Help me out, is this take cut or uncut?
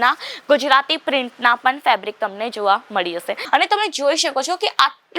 cut